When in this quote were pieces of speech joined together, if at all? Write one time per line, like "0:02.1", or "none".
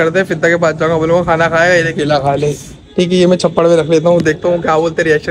none

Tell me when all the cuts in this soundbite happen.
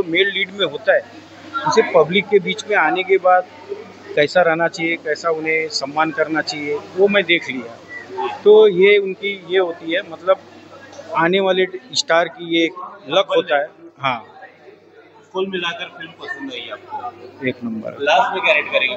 none

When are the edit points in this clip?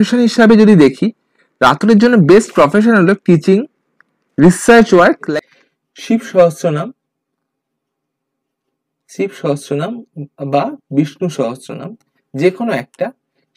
0:05.2

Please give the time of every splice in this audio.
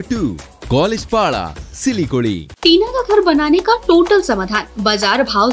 0:02.5

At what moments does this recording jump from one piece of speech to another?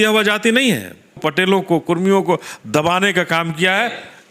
0:01.2

